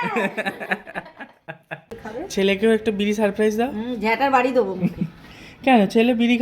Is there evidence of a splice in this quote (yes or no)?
yes